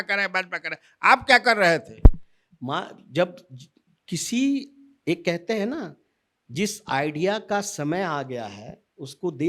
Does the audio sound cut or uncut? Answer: uncut